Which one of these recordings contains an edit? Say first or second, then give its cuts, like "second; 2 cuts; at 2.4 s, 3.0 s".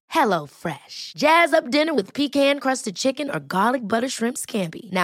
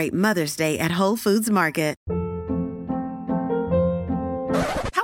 second; 1 cut; at 2.0 s